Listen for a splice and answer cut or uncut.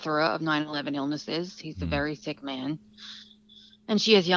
uncut